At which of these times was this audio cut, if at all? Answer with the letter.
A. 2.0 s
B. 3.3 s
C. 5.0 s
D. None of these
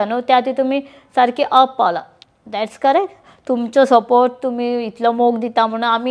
D